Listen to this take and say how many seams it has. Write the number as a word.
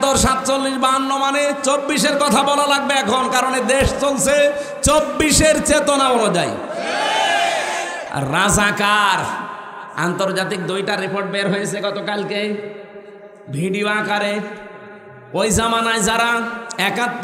one